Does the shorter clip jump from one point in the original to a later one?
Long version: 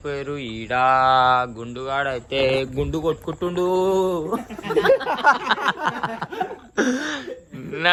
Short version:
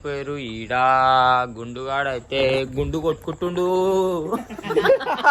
no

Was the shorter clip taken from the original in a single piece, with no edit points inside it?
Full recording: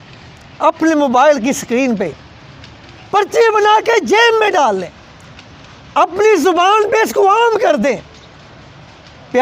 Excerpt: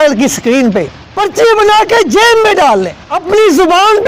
no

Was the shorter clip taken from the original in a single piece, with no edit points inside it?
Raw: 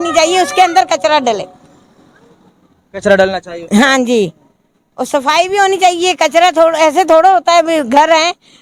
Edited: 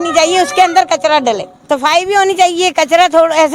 no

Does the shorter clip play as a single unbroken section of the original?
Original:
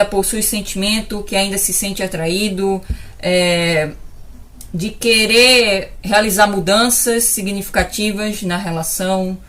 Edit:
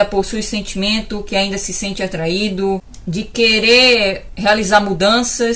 no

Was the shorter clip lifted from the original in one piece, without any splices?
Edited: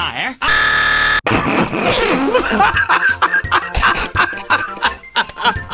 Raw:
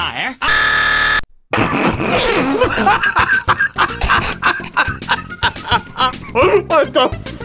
no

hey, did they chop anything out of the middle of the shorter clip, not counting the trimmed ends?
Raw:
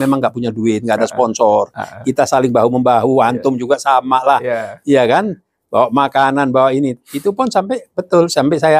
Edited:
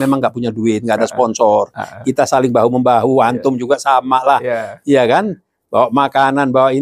no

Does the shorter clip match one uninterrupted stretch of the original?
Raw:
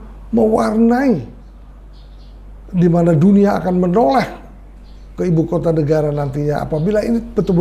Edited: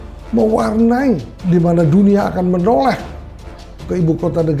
no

